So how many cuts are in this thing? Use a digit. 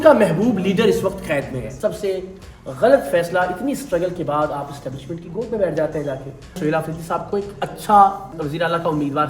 2